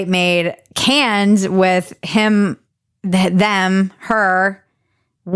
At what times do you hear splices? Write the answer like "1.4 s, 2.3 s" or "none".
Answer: none